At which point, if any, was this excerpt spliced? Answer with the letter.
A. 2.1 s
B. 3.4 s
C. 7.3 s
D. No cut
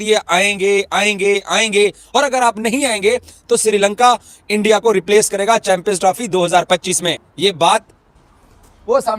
D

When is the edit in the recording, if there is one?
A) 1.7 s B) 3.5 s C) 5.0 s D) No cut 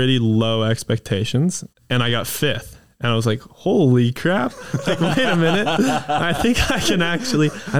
A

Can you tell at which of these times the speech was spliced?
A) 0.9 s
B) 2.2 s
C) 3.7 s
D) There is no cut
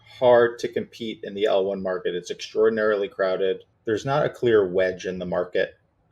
C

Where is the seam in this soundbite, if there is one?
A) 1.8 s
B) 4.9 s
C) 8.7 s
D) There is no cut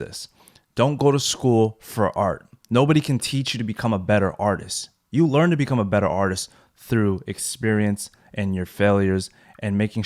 D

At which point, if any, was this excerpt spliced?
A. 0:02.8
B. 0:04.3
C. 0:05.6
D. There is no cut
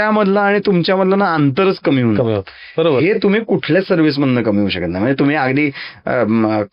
D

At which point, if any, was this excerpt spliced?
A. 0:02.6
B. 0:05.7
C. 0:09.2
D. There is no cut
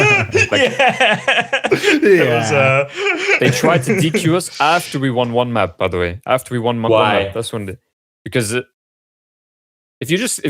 C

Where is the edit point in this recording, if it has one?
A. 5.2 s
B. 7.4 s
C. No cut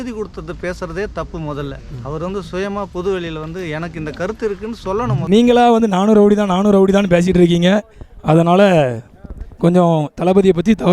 A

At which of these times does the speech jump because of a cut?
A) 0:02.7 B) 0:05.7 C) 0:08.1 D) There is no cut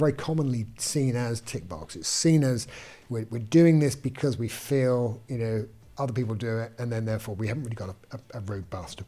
D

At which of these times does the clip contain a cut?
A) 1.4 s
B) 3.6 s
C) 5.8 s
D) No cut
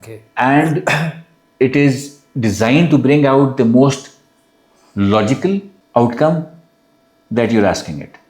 C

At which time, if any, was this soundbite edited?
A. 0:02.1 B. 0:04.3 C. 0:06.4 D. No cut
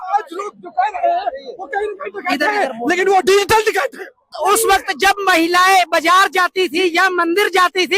B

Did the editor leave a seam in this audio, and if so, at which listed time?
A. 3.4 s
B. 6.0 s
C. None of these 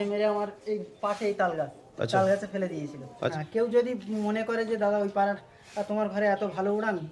A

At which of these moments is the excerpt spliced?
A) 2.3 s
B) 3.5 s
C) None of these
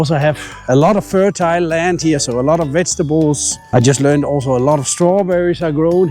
B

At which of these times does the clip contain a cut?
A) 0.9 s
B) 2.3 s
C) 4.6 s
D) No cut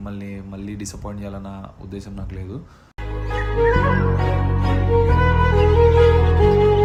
D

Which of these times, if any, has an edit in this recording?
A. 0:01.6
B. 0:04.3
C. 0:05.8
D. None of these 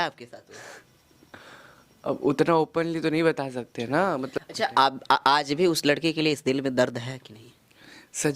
B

